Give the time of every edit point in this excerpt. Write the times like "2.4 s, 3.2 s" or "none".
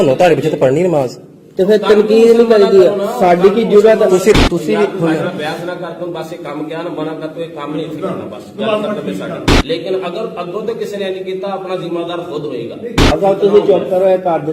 4.4 s, 9.5 s, 13.0 s